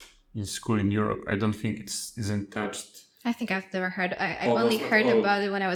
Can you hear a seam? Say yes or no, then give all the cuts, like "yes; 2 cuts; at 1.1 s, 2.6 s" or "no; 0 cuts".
no; 0 cuts